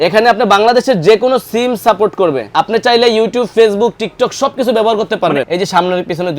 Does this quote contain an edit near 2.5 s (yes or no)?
yes